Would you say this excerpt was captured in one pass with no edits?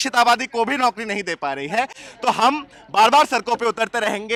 yes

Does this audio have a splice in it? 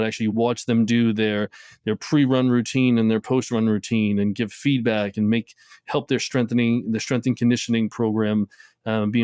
no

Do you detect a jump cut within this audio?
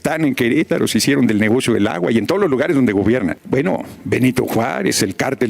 yes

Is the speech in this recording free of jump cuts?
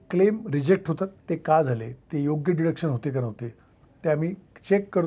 no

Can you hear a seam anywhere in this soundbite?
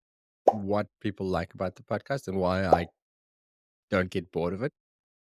no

